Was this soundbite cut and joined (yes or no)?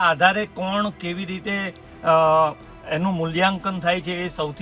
no